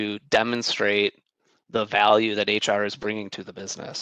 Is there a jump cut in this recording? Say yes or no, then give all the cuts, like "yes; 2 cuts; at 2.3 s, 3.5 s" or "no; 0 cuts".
no; 0 cuts